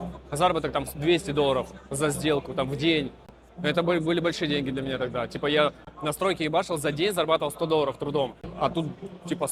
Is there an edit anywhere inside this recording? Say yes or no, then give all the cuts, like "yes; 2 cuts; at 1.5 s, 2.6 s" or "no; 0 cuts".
no; 0 cuts